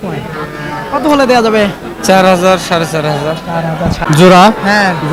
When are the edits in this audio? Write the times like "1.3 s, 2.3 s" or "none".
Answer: 4.0 s